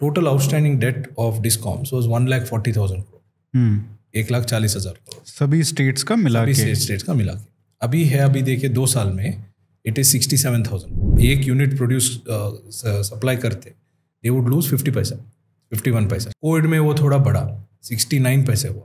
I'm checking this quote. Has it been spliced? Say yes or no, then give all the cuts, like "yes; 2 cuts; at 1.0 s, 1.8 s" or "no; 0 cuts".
yes; 2 cuts; at 11.2 s, 16.3 s